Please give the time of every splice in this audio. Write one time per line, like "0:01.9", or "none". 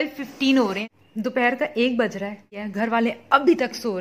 0:00.9
0:02.5

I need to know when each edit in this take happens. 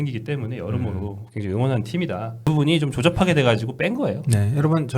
0:02.5

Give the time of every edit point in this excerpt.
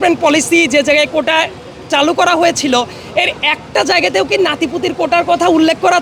none

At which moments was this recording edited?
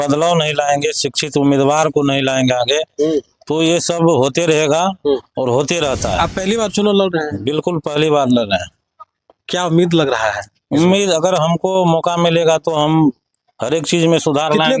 none

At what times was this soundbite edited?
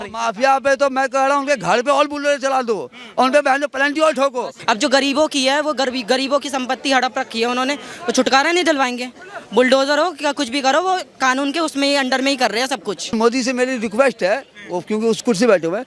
0:04.5
0:13.1

